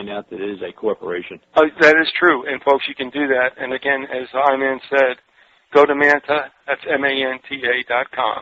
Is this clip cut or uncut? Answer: uncut